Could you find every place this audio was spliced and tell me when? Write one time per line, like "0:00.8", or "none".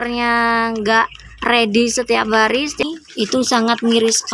0:02.8